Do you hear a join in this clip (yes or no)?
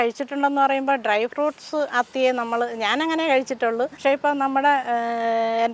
yes